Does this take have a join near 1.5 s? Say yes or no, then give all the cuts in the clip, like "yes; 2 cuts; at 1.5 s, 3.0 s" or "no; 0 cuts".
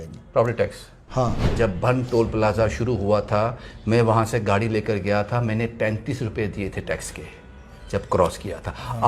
yes; 1 cut; at 1.5 s